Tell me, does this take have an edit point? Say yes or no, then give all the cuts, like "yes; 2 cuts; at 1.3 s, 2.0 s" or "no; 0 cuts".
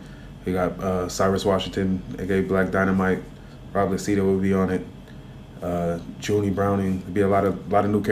no; 0 cuts